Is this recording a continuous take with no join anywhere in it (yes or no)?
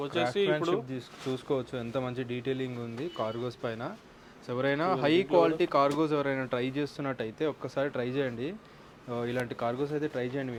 yes